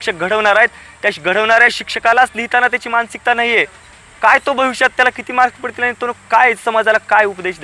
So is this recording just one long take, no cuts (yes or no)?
yes